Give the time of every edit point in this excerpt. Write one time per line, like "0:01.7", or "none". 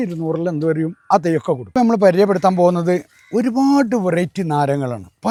none